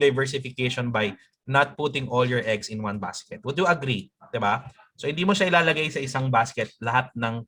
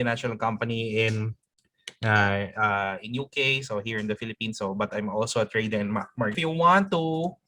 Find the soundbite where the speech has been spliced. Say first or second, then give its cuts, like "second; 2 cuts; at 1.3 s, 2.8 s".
second; 1 cut; at 6.4 s